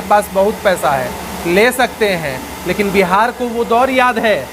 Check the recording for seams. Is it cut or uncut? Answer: uncut